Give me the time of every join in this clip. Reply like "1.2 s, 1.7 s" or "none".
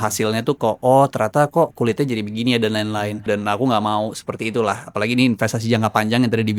3.2 s